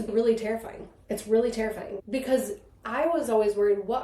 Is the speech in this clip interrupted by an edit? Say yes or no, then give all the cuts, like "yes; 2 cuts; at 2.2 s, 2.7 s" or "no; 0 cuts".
yes; 1 cut; at 1.9 s